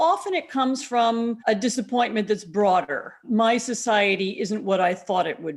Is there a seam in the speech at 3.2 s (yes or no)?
yes